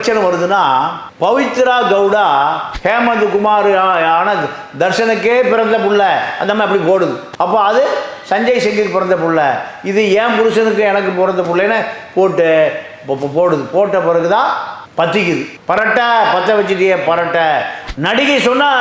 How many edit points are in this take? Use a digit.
2